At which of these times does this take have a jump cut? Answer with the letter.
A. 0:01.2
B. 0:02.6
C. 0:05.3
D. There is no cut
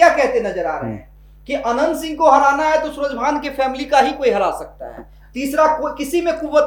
D